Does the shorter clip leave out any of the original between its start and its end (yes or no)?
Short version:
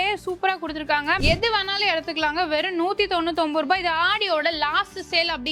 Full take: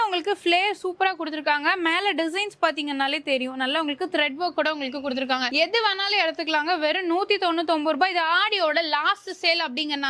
yes